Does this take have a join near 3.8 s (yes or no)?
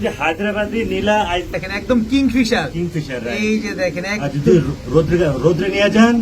no